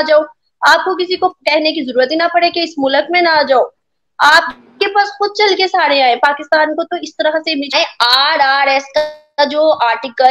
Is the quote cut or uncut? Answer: cut